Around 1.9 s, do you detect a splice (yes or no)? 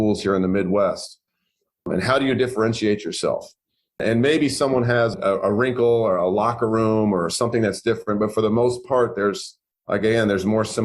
yes